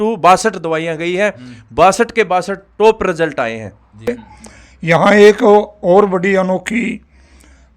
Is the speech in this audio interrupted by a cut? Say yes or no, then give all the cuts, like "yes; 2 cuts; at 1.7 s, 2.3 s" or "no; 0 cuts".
yes; 1 cut; at 3.9 s